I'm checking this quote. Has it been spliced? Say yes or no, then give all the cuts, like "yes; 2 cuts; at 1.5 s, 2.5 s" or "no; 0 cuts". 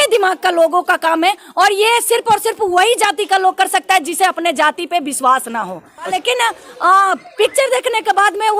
yes; 1 cut; at 6.1 s